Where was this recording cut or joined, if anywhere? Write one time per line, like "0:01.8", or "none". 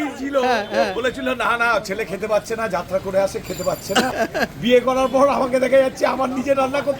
0:04.1